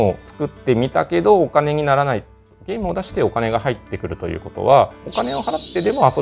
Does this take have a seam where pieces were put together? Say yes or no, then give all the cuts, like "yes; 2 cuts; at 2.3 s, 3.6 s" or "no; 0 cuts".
yes; 1 cut; at 2.6 s